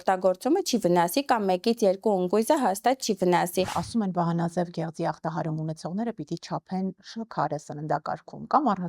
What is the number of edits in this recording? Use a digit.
1